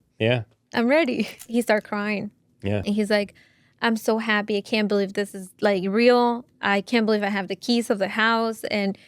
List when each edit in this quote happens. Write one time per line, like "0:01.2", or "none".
0:01.3
0:02.8